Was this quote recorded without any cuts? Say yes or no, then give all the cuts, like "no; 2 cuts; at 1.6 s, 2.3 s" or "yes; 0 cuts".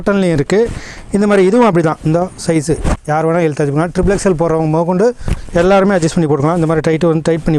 yes; 0 cuts